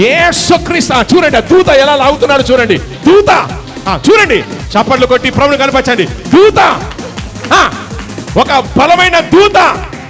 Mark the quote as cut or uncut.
uncut